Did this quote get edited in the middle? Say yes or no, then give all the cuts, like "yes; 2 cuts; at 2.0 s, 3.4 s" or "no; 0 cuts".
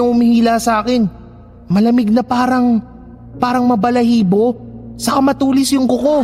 no; 0 cuts